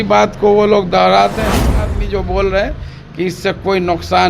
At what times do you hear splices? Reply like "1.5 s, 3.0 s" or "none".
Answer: 2.0 s